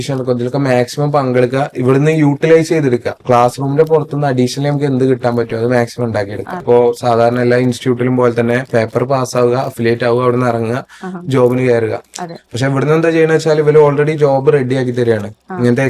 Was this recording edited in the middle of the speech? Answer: yes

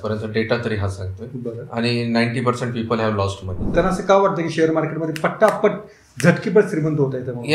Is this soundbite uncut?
no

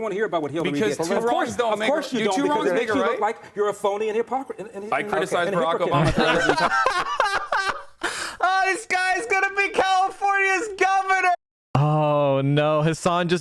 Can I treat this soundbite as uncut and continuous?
no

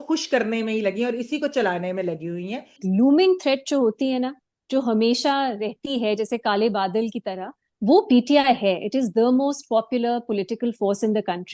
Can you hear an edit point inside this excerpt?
yes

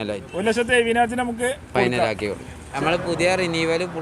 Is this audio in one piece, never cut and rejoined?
no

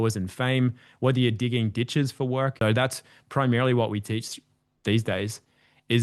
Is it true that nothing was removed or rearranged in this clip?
no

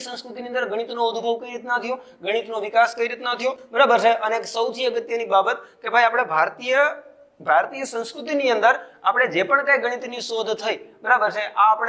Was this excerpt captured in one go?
yes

